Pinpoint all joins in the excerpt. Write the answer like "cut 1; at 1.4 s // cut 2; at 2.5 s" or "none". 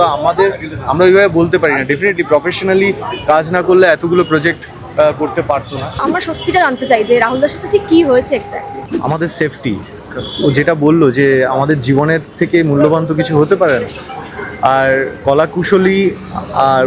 cut 1; at 6.1 s // cut 2; at 8.8 s